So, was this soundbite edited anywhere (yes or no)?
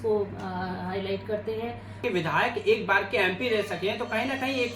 yes